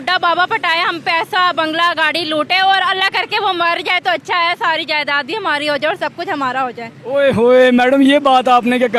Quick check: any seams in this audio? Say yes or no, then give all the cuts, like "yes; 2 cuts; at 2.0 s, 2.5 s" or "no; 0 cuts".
no; 0 cuts